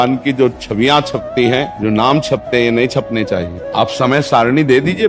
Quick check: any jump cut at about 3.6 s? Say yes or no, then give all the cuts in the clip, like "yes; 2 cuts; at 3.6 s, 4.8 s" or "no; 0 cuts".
yes; 2 cuts; at 1.7 s, 3.6 s